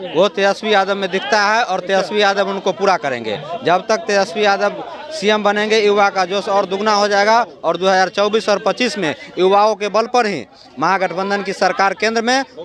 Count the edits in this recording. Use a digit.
0